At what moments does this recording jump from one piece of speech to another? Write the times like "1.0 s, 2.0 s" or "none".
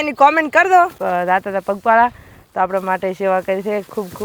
1.0 s